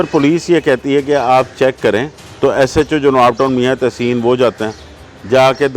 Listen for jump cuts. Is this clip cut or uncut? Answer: cut